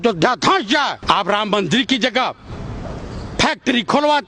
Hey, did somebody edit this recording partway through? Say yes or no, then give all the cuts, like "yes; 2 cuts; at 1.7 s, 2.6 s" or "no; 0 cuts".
yes; 1 cut; at 1.0 s